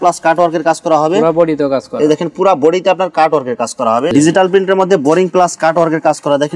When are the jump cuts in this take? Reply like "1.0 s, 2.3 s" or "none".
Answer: 4.1 s